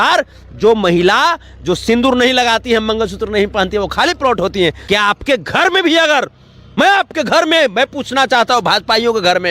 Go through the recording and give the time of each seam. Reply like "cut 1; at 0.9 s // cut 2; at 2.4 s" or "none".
cut 1; at 4.8 s